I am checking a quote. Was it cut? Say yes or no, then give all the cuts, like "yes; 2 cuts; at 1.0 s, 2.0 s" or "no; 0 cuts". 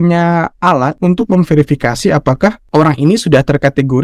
yes; 2 cuts; at 1.0 s, 2.6 s